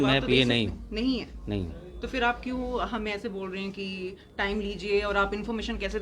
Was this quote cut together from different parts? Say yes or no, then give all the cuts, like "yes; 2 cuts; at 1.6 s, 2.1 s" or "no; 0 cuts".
no; 0 cuts